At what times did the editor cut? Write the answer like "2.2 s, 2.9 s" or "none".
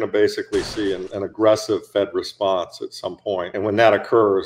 1.1 s, 3.5 s